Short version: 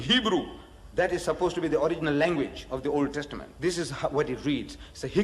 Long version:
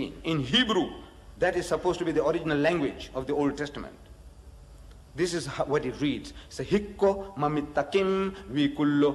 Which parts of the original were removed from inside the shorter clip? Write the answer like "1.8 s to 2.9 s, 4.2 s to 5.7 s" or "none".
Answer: 3.9 s to 5.0 s